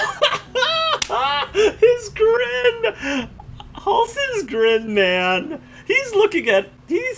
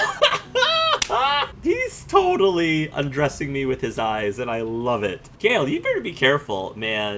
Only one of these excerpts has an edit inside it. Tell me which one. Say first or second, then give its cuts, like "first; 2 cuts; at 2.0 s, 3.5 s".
second; 2 cuts; at 1.5 s, 5.3 s